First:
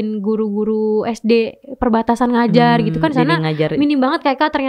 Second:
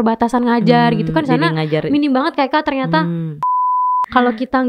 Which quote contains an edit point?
second; 1 cut; at 3.8 s

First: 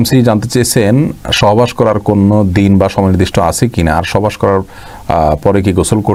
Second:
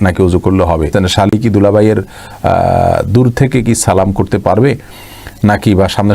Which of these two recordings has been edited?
second; 1 cut; at 0.9 s

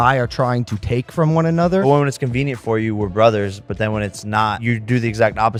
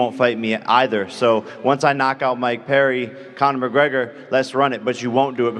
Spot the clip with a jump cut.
second; 1 cut; at 1.5 s

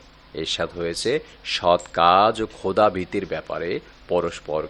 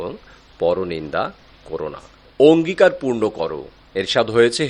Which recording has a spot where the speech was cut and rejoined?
second; 1 cut; at 2.3 s

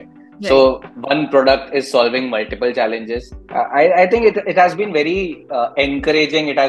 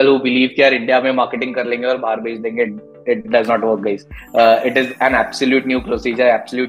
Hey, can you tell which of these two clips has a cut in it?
first; 1 cut; at 3.3 s

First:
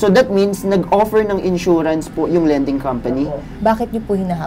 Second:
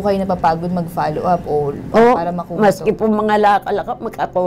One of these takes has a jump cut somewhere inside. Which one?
first; 1 cut; at 3.5 s

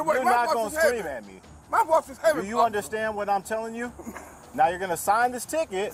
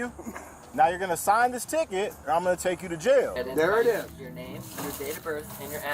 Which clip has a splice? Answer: second; 1 cut; at 3.4 s

